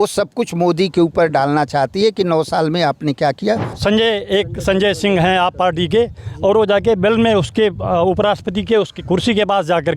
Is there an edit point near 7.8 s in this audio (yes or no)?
no